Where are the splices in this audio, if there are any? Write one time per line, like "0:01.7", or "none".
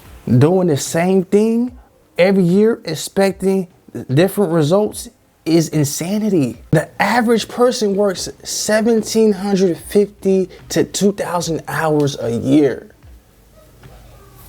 0:06.6